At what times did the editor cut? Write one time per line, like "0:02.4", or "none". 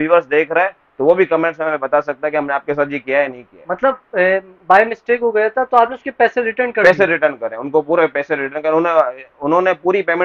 none